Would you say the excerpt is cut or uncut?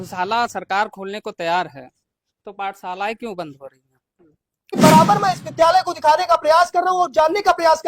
cut